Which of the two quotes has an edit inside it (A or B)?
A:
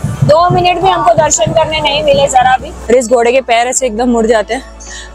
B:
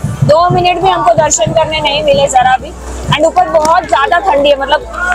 A